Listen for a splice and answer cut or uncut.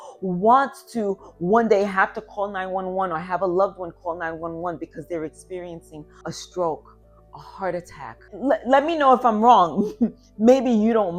cut